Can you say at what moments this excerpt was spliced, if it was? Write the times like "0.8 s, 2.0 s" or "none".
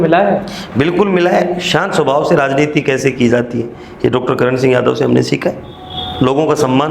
none